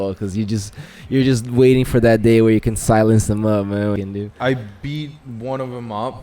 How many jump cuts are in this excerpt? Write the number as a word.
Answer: one